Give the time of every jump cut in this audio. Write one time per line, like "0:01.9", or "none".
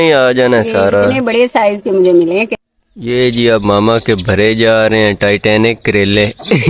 0:02.5